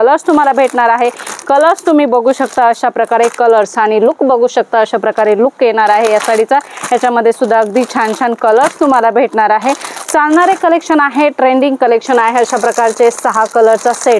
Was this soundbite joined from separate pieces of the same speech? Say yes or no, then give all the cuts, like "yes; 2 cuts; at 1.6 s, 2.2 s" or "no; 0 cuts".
no; 0 cuts